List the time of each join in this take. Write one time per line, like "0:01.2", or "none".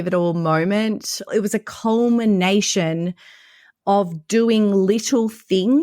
0:01.3